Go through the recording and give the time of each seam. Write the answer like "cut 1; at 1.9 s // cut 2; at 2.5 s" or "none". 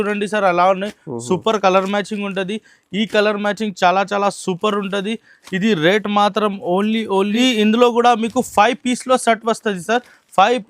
cut 1; at 7.3 s